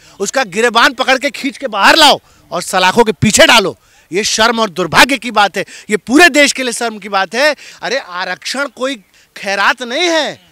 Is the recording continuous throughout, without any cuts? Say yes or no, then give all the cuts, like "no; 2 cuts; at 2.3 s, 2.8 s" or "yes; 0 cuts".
no; 1 cut; at 7.7 s